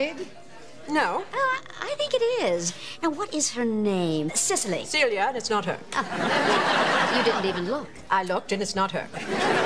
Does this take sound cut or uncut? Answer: cut